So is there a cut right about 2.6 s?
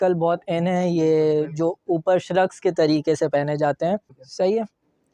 no; 1 cut; at 4.2 s

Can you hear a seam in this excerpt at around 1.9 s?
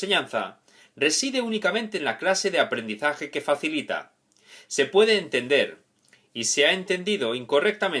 yes; 1 cut; at 1.9 s

